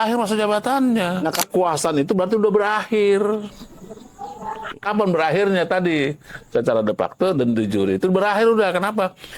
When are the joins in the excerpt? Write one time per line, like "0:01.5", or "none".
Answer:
0:01.4